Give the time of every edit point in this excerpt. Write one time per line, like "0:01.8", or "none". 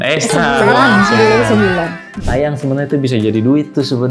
0:02.1